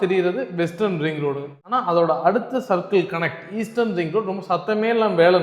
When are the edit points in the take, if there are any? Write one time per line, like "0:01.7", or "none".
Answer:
0:01.5